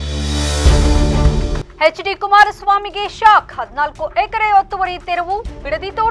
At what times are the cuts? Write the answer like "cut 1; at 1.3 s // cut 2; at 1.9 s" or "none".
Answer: cut 1; at 1.6 s